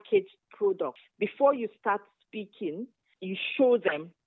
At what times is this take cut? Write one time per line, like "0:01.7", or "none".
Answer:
0:01.0
0:03.0

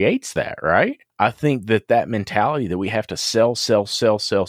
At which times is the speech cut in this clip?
0:01.0

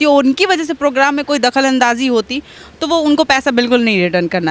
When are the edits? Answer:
none

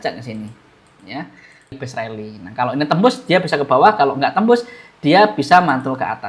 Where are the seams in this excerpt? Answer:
0:01.8

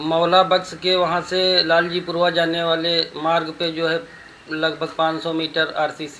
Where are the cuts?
none

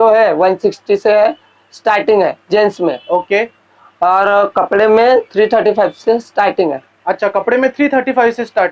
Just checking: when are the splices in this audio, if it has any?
none

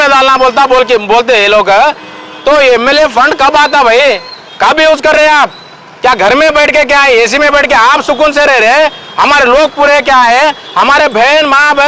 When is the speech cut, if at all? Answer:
none

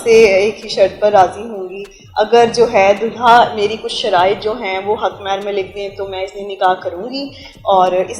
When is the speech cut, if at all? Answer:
none

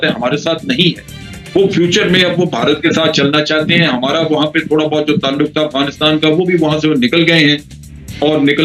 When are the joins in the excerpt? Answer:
none

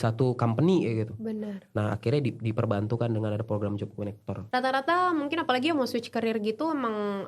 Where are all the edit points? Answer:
none

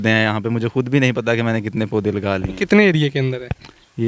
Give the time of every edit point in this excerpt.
none

